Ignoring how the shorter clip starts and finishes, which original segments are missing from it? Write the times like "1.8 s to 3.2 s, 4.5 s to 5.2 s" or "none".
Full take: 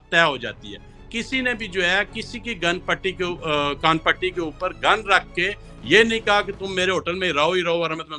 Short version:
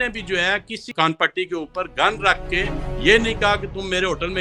2.4 s to 3.8 s